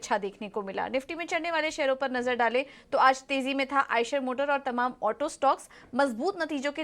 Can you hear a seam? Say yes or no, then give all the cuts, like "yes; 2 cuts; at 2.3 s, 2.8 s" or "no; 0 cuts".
yes; 1 cut; at 2.1 s